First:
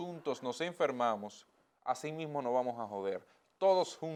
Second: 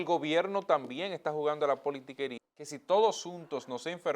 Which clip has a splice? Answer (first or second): second